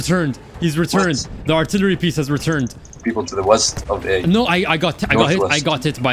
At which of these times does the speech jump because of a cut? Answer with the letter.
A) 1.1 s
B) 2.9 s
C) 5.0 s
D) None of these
B